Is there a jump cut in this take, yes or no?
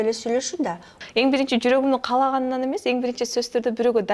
yes